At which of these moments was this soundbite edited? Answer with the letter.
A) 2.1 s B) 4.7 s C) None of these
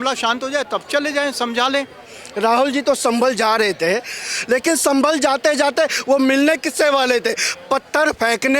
A